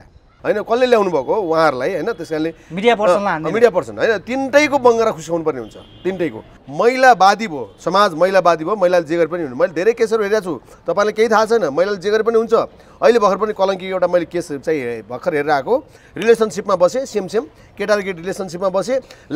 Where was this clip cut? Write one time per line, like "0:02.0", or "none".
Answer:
0:06.6